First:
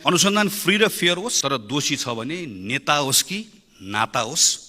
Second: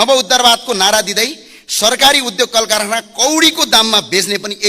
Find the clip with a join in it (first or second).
first